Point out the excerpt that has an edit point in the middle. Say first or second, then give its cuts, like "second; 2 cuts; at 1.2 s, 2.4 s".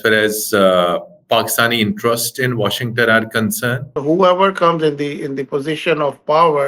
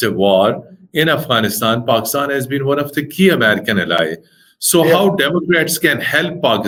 first; 1 cut; at 3.9 s